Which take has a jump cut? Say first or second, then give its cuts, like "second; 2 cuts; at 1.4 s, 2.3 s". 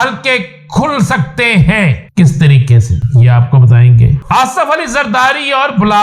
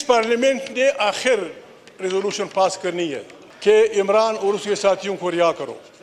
first; 3 cuts; at 2.0 s, 3.0 s, 4.2 s